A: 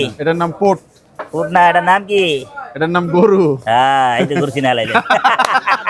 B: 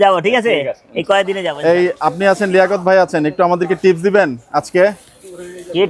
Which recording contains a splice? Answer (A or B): B